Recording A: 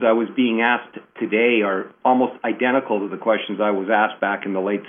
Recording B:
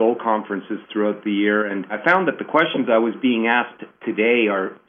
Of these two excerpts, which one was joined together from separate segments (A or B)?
B